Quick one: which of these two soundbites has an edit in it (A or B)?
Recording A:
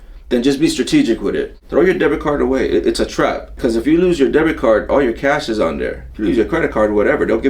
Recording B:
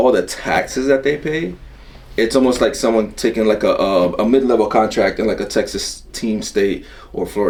A